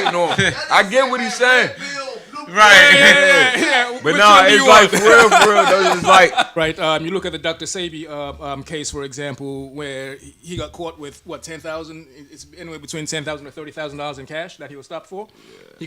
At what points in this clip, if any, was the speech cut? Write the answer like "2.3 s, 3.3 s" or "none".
6.5 s